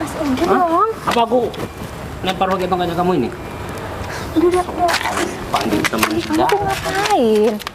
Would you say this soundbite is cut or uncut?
uncut